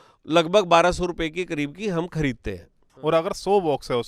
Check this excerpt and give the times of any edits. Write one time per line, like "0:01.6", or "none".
0:02.9

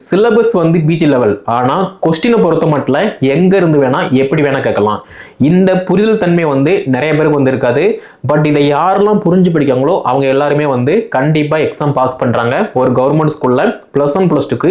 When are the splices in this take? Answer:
none

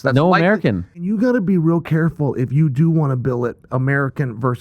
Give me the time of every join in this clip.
0:01.0

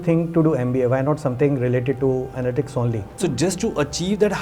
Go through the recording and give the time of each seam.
0:03.1

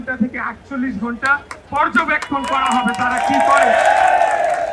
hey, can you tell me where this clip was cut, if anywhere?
none

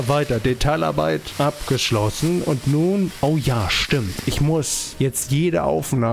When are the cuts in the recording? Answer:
0:01.3
0:03.1
0:04.8

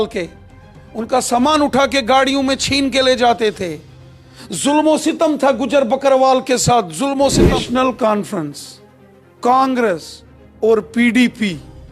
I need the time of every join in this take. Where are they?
0:07.5

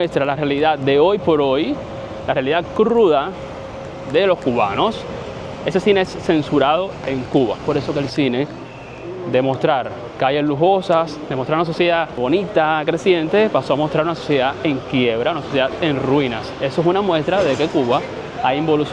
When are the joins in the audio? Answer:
0:07.6
0:12.2

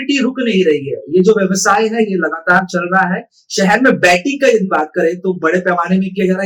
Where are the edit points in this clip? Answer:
none

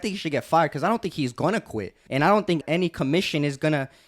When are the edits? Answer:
0:02.0
0:02.6

